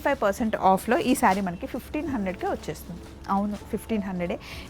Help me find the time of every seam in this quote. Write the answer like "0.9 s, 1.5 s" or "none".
none